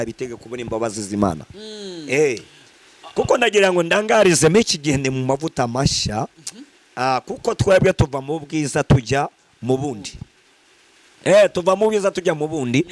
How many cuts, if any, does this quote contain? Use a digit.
0